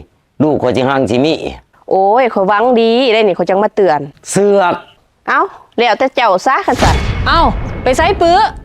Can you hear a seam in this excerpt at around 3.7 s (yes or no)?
no